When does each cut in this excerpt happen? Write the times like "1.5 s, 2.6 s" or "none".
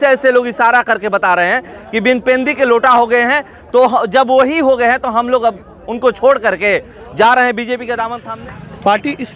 none